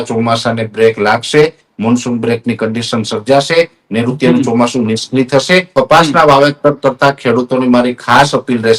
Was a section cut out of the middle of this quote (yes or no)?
yes